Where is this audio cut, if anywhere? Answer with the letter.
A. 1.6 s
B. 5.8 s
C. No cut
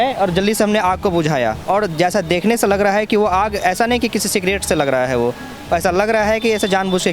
A